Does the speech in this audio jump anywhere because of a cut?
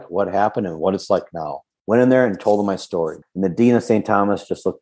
yes; 2 cuts; at 1.7 s, 3.2 s

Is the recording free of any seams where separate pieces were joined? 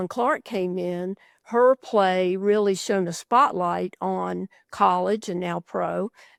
yes; 0 cuts

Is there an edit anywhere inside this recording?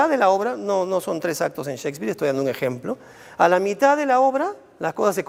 no; 0 cuts

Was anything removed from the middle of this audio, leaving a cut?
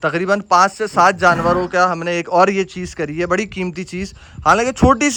no; 0 cuts

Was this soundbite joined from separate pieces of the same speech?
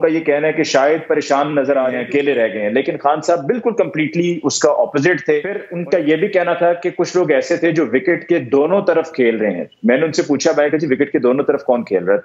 yes; 2 cuts; at 2.0 s, 5.7 s

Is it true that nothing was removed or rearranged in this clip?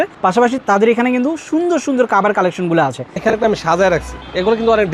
no; 1 cut; at 3.1 s

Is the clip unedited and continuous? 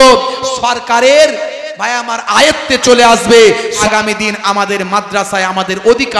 no; 1 cut; at 3.8 s

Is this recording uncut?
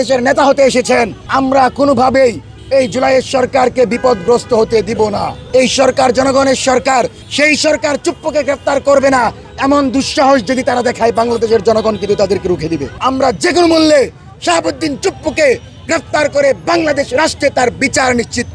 no; 4 cuts; at 1.2 s, 5.3 s, 7.2 s, 12.9 s

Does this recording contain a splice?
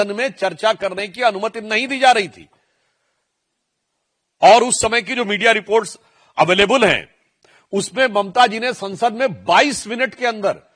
no; 0 cuts

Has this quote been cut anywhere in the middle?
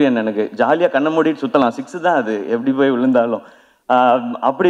no; 0 cuts

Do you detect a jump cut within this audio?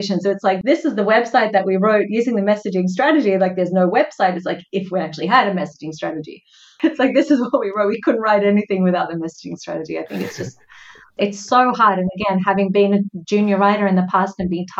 no; 0 cuts

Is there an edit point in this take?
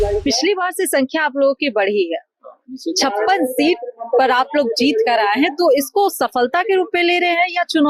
no; 0 cuts

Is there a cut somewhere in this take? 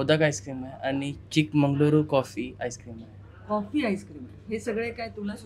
no; 0 cuts

